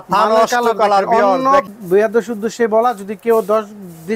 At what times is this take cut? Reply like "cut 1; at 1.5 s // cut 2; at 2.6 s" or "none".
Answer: cut 1; at 1.6 s